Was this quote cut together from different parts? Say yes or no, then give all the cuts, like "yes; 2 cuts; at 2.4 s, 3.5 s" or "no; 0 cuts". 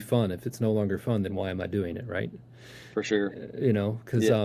no; 0 cuts